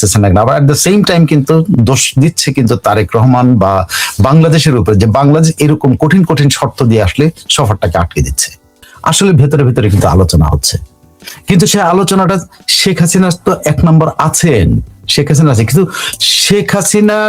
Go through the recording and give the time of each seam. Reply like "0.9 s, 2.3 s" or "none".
8.9 s

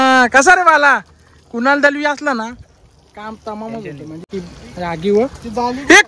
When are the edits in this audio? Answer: 4.2 s

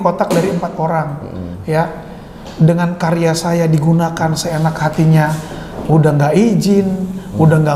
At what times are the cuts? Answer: none

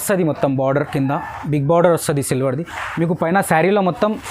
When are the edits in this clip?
none

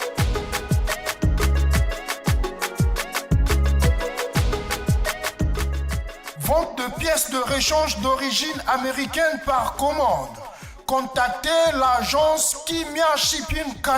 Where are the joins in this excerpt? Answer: none

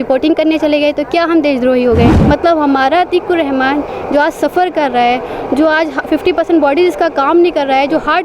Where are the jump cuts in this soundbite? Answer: 2.2 s

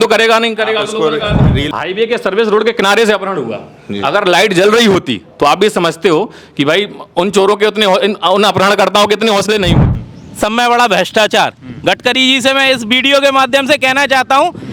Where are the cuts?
1.6 s, 9.9 s

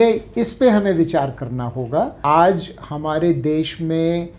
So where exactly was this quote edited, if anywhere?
2.2 s

